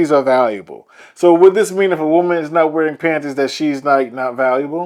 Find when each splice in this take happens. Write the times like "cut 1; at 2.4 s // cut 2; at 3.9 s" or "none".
none